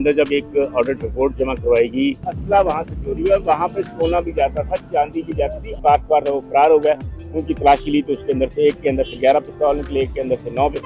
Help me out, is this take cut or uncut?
cut